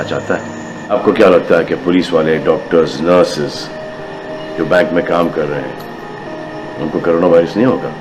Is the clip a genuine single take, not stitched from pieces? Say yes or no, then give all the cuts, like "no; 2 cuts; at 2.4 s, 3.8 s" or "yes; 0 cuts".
no; 1 cut; at 0.9 s